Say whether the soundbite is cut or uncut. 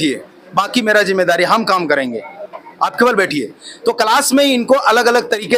uncut